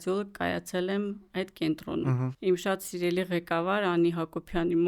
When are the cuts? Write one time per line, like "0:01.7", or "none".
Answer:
0:02.3